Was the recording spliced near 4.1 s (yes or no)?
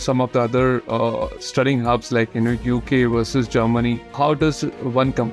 yes